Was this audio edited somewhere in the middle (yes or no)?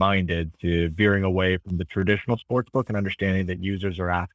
no